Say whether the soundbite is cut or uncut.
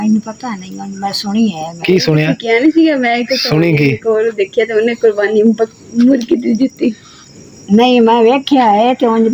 uncut